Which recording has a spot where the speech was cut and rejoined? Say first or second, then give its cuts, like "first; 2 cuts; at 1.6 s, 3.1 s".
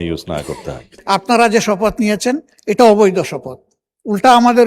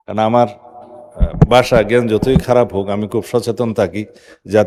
first; 1 cut; at 0.9 s